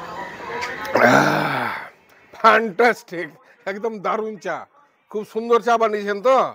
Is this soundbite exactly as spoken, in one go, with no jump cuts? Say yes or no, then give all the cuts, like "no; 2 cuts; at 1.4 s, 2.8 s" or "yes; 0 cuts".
yes; 0 cuts